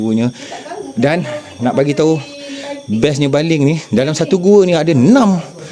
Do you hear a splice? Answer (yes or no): no